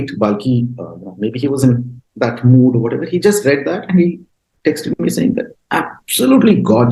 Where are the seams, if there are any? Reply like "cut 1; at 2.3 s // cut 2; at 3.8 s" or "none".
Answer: none